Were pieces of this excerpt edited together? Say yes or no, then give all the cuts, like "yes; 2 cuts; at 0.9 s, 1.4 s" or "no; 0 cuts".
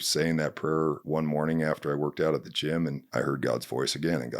yes; 1 cut; at 1.0 s